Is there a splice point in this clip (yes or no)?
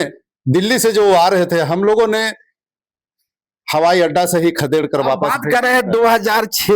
no